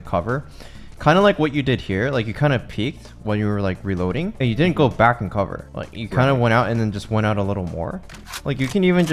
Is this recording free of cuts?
no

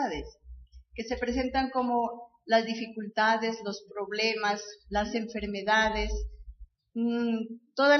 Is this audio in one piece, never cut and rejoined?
no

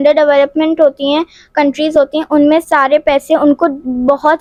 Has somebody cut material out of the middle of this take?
no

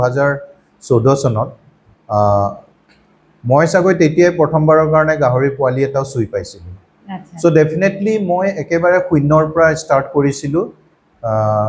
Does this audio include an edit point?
no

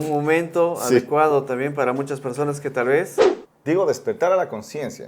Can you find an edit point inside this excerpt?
yes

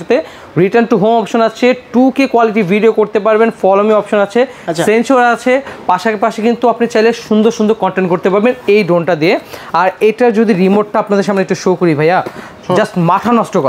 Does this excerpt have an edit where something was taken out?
no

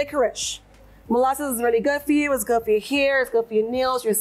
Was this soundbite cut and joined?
no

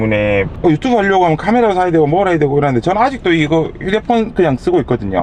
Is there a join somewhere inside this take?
no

